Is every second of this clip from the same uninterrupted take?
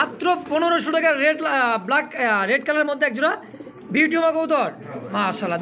yes; 0 cuts

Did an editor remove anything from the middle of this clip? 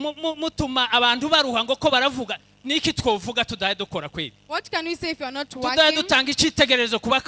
no; 0 cuts

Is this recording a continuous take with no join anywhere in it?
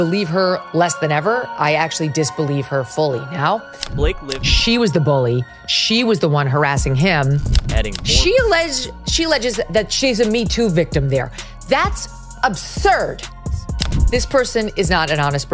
no; 3 cuts; at 4.0 s, 7.6 s, 13.6 s

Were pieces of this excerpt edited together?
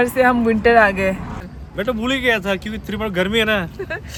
no; 0 cuts

